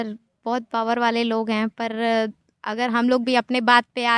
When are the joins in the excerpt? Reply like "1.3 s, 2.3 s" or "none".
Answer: none